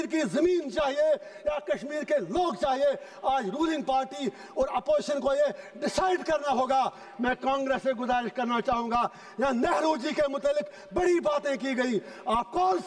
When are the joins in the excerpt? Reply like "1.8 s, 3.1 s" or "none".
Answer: none